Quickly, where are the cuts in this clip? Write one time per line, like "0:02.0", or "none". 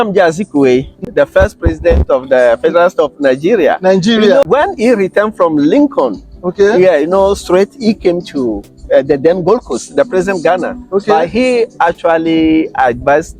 0:01.0
0:04.4